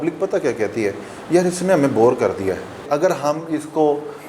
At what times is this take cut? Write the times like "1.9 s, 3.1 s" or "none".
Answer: 2.8 s